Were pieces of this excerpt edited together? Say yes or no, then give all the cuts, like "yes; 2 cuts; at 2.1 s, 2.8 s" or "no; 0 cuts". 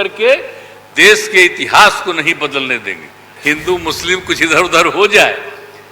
yes; 1 cut; at 3.3 s